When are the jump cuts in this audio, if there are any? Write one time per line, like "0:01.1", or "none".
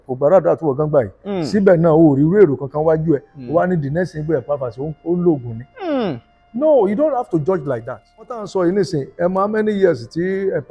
0:08.4